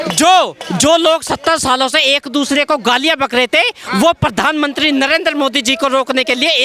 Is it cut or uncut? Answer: uncut